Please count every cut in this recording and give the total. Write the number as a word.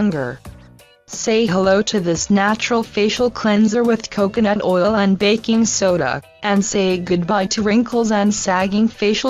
one